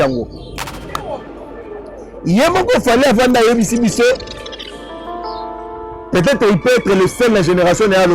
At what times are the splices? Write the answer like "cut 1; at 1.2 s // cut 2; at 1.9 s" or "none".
none